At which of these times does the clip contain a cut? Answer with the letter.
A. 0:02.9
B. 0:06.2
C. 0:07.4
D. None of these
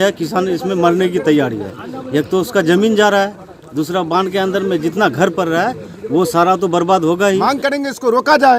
C